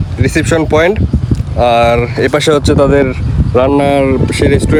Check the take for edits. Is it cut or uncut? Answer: uncut